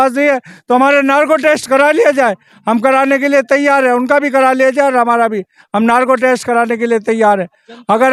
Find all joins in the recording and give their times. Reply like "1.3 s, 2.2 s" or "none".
none